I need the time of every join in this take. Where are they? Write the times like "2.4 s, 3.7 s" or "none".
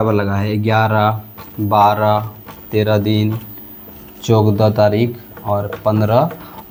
none